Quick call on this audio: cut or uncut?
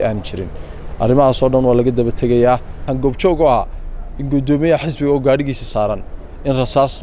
cut